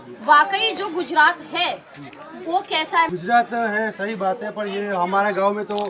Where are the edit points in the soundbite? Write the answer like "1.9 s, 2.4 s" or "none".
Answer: 3.1 s